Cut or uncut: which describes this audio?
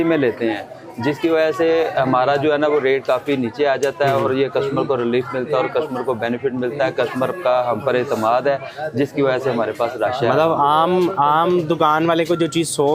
uncut